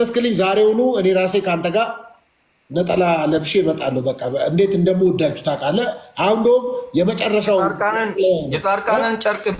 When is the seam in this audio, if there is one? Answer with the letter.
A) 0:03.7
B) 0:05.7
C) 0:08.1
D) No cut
D